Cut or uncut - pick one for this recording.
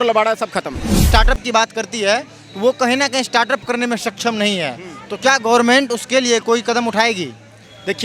cut